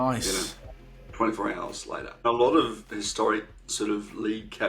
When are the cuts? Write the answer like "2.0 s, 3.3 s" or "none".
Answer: 2.2 s